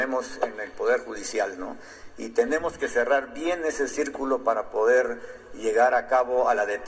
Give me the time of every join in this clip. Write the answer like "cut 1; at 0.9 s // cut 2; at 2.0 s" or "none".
none

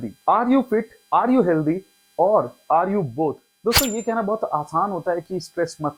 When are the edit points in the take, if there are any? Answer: cut 1; at 3.5 s

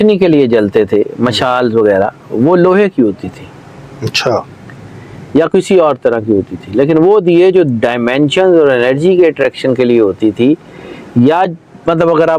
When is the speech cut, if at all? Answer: none

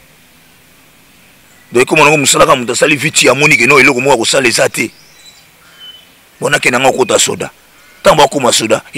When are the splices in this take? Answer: none

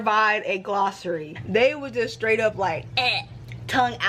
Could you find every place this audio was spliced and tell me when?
cut 1; at 1.3 s

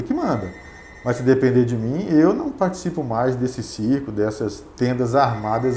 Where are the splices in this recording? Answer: none

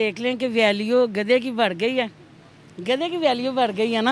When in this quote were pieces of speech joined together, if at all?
none

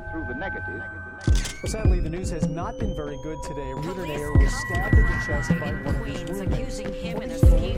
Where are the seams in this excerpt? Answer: none

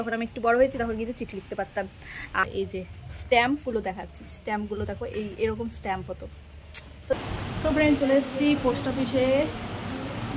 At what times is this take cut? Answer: cut 1; at 2.4 s // cut 2; at 7.1 s

